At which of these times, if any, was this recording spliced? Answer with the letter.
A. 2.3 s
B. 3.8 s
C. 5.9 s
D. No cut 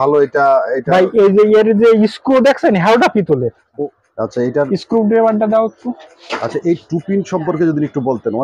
B